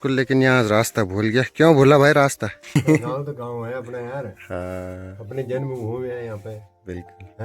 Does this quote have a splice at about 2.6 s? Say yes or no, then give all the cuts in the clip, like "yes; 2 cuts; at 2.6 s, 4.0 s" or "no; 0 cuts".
yes; 1 cut; at 2.6 s